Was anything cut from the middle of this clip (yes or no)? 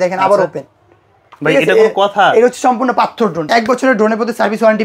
yes